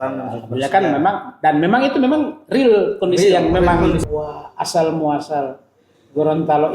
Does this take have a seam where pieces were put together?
yes; 1 cut; at 4.0 s

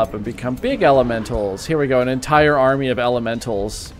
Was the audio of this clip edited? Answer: no; 0 cuts

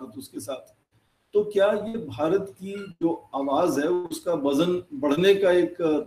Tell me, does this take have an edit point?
no; 0 cuts

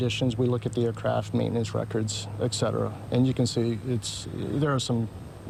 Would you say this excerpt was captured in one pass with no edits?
yes; 0 cuts

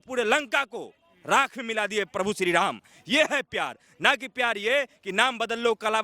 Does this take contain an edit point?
no; 0 cuts

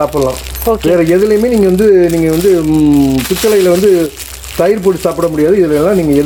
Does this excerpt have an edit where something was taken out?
no; 0 cuts

